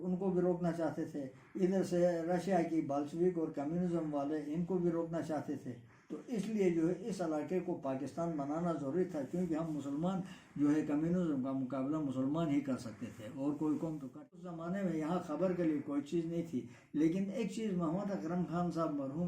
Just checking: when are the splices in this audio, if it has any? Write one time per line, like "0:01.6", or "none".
0:14.4